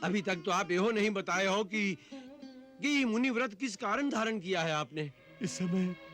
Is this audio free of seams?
no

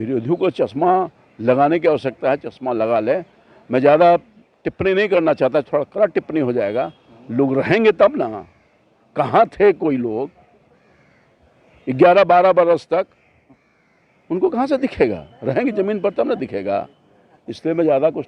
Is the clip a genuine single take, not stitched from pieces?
yes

